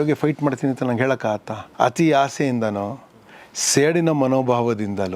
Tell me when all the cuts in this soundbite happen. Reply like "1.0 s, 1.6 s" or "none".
1.6 s